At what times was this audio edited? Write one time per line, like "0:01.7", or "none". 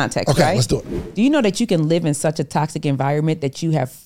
0:00.9